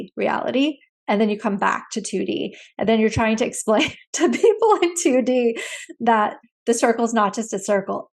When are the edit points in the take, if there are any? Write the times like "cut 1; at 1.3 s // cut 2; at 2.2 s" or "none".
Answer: none